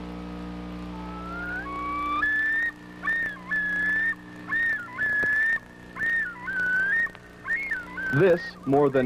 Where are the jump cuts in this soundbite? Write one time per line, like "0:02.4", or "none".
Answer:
none